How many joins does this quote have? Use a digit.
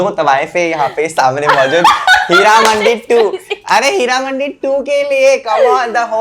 0